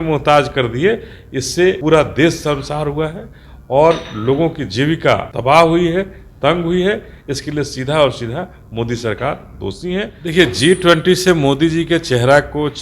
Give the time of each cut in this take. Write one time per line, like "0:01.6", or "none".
0:01.8
0:05.3
0:10.3